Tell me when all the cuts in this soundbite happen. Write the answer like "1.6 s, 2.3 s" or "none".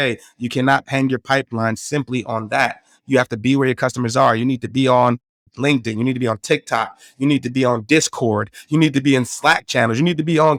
none